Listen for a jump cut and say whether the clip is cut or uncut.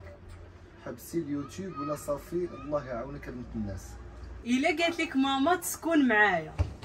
cut